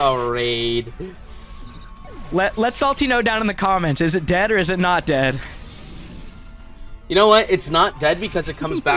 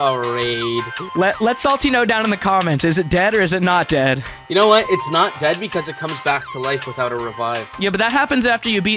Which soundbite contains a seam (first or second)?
second